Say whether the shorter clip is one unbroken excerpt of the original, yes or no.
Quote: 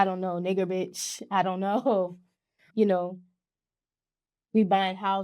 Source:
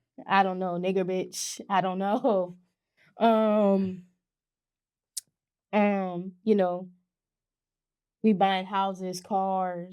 no